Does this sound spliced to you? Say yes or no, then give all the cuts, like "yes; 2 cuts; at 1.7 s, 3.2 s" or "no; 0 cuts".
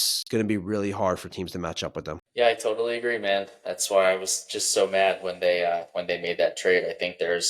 yes; 1 cut; at 2.2 s